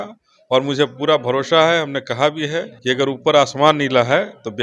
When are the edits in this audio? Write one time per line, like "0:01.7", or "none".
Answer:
0:02.7